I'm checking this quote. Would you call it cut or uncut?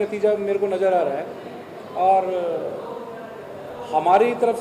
uncut